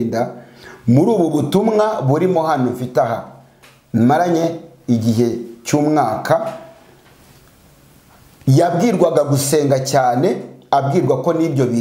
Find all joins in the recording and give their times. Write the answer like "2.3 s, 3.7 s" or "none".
none